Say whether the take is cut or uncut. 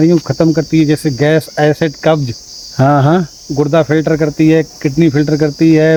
uncut